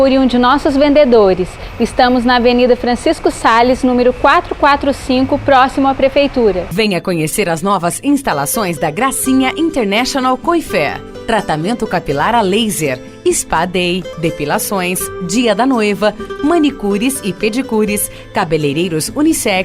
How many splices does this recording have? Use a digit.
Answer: 1